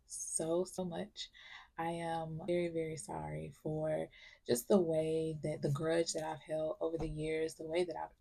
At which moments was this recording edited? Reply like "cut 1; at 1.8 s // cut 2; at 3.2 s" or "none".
none